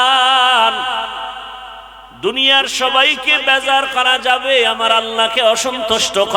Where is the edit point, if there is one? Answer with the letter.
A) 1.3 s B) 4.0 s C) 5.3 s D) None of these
D